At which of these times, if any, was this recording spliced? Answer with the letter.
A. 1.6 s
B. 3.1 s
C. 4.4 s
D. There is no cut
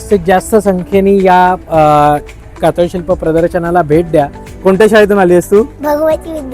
C